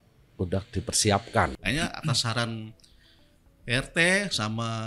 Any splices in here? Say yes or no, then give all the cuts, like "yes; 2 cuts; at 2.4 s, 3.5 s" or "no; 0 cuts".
yes; 1 cut; at 1.6 s